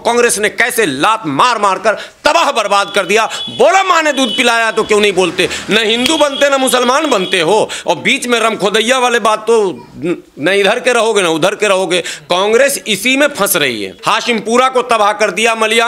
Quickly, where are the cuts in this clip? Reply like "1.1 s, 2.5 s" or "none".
14.0 s